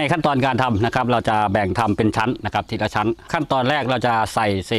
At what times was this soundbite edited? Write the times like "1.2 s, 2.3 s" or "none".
3.3 s